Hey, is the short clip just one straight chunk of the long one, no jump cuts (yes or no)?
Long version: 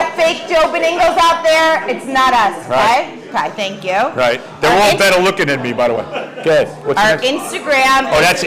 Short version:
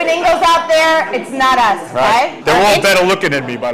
no